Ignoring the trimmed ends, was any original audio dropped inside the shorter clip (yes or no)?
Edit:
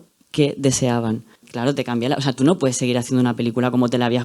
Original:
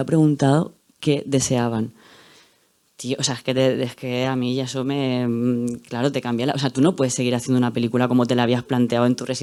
yes